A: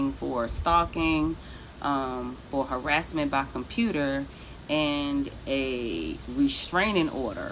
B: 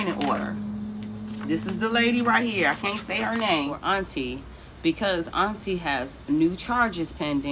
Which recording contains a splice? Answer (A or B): B